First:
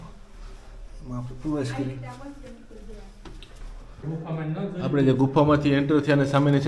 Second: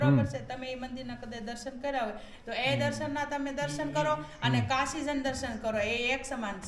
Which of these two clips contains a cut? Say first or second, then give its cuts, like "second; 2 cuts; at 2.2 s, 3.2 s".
first; 1 cut; at 4.0 s